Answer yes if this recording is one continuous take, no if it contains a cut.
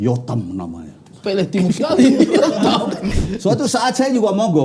no